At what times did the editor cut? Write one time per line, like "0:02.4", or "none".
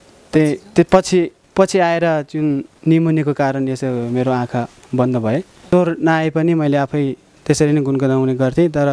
0:05.7